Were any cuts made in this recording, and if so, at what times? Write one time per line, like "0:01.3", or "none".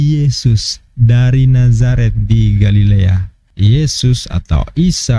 0:03.4